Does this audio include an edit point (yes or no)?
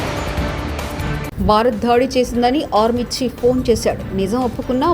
yes